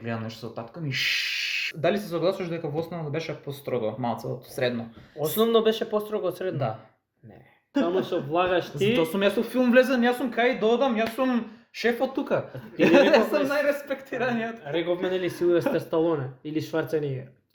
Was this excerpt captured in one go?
no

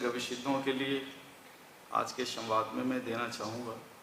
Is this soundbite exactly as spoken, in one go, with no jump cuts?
yes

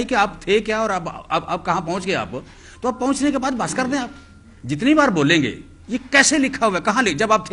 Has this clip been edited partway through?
no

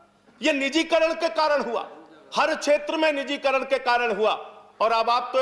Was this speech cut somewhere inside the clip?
no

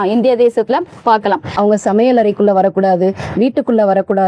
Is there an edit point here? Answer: yes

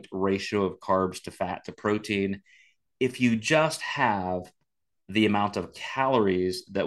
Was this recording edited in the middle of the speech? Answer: no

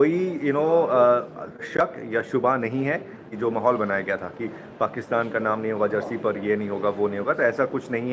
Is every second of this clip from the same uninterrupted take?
no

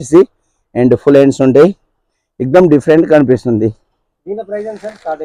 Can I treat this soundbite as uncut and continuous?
yes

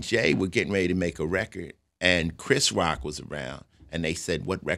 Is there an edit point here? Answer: no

